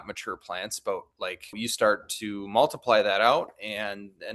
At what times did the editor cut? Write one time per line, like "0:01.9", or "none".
0:01.5